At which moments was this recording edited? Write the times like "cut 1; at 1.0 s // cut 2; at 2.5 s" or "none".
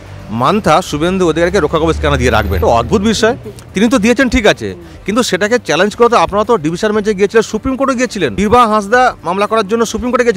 cut 1; at 2.5 s // cut 2; at 8.3 s